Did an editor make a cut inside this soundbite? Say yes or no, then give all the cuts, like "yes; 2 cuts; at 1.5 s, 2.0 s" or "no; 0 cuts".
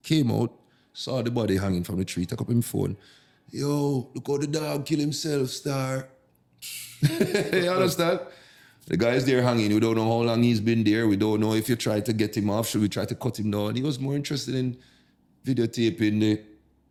no; 0 cuts